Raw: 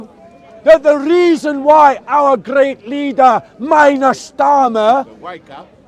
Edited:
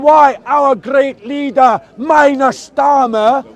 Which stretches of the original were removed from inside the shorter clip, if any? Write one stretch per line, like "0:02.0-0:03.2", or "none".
none